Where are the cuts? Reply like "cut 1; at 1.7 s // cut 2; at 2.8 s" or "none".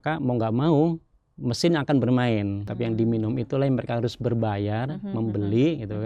cut 1; at 2.6 s